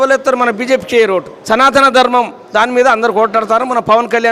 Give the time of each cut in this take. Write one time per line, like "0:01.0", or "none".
0:01.3

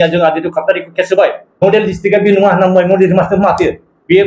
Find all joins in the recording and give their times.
0:01.4

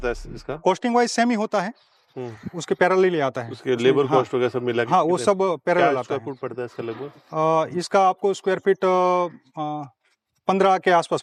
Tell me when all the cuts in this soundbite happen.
none

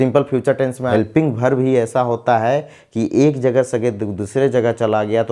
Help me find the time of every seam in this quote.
0:00.9

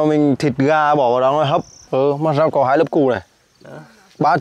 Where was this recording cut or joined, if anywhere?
0:01.8

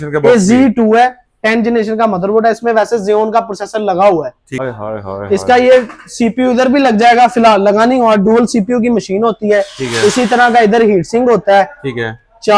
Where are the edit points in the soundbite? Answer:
0:04.5

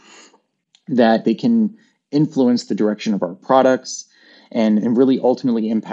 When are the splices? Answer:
0:01.2

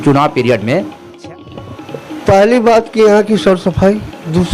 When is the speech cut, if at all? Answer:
0:01.2

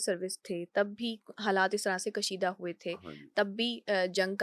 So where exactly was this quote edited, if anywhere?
none

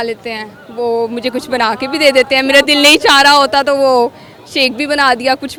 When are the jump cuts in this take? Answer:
none

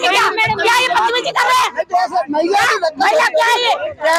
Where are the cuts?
none

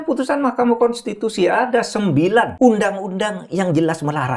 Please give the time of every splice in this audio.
0:02.5

